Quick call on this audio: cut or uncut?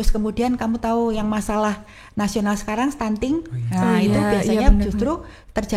uncut